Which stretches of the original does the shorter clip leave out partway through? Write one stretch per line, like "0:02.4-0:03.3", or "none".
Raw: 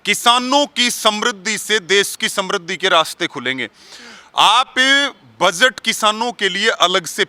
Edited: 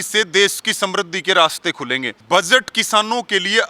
0:03.7-0:05.2

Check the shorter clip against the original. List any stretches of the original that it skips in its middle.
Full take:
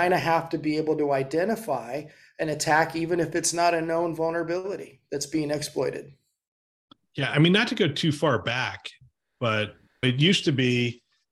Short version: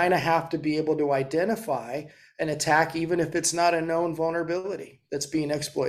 none

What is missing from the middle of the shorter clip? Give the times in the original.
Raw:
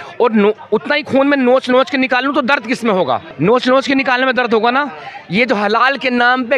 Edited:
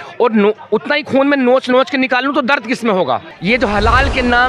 0:03.3-0:05.2

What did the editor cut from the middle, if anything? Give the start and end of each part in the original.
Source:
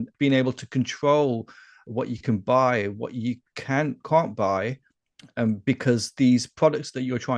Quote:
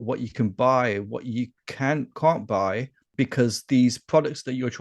0:05.0-0:05.6

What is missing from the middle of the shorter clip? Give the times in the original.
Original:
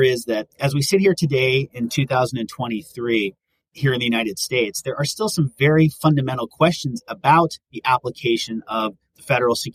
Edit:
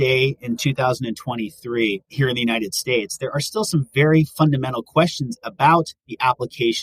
0:03.4-0:03.7

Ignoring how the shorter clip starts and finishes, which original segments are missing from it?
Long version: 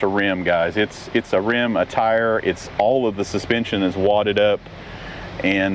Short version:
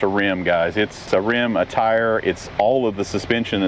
0:01.1-0:01.3

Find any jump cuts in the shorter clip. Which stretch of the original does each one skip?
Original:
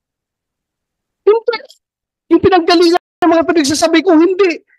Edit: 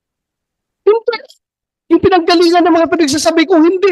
0:03.0-0:03.2

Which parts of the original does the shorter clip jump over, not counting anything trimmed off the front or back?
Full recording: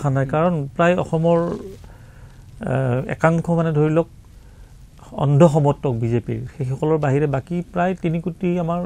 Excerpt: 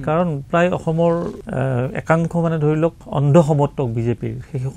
0:01.7-0:02.5
0:04.2-0:05.1

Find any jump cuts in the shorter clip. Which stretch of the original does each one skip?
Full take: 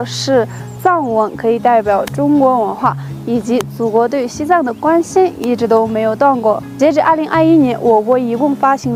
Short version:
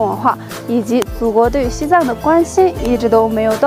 none

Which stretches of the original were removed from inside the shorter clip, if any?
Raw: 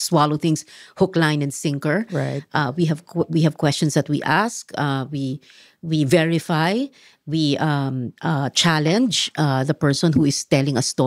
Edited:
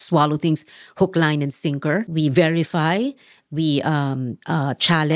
0:02.1-0:05.8

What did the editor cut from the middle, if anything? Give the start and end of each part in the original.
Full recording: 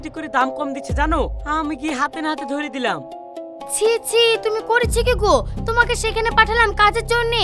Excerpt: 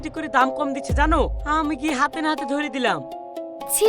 none

